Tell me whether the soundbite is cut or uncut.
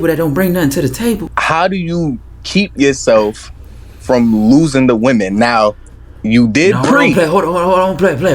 cut